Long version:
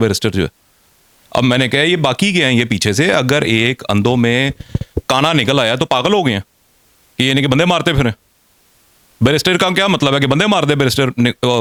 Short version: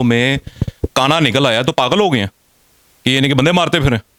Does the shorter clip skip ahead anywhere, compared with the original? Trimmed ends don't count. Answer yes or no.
no